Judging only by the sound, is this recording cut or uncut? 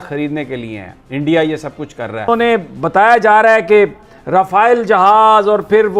cut